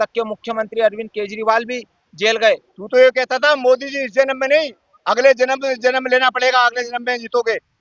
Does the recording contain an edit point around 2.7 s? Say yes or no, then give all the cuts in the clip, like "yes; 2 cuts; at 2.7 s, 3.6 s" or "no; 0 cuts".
yes; 1 cut; at 2.7 s